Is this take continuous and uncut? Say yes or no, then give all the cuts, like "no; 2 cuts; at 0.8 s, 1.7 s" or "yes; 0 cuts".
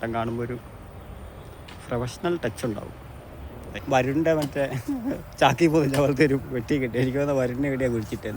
no; 1 cut; at 3.8 s